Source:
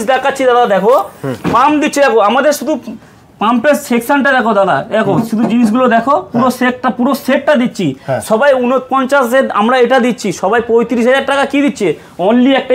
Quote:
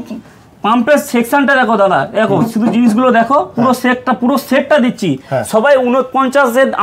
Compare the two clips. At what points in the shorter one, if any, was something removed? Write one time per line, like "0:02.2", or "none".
none